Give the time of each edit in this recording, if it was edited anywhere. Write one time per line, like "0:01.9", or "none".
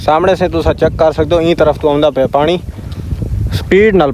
none